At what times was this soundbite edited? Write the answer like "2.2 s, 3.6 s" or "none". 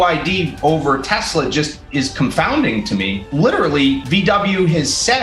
3.2 s, 4.0 s